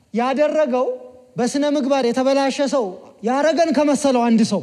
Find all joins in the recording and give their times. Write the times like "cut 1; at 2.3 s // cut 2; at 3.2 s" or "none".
none